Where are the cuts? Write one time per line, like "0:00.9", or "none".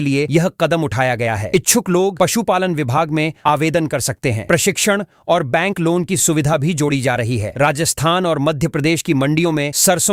none